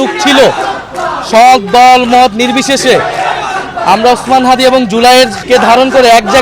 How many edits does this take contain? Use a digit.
1